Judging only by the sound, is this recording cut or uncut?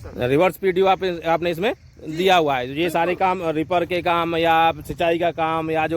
uncut